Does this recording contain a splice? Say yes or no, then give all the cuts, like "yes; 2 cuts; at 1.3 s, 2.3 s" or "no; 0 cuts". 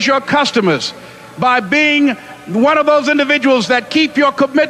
no; 0 cuts